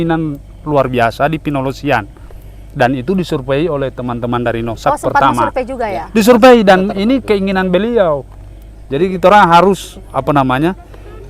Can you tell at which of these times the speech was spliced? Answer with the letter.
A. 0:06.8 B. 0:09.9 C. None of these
C